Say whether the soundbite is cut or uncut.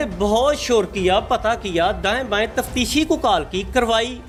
uncut